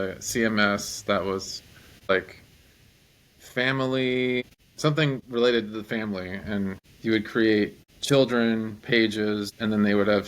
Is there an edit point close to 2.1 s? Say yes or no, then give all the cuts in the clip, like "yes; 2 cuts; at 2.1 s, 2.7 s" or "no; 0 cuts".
yes; 2 cuts; at 2.1 s, 4.5 s